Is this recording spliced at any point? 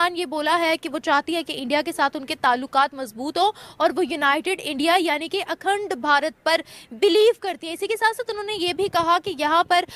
no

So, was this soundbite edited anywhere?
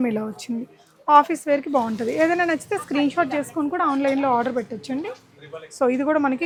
no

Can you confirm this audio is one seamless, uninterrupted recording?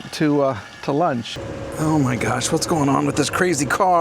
no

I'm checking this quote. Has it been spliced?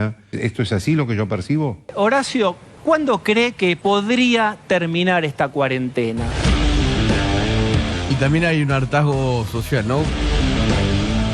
yes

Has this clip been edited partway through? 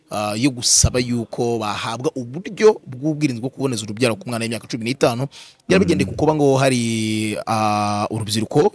no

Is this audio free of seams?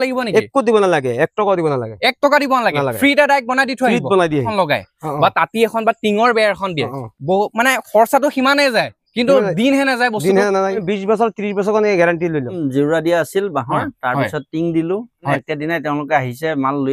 no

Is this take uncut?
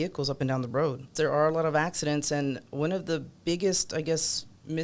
no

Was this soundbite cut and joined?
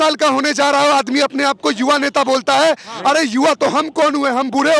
no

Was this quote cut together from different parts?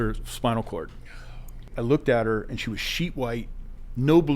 yes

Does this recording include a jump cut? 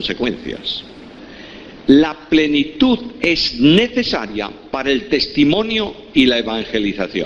yes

